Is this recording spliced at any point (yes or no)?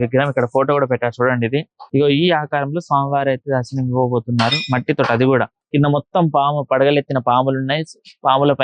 yes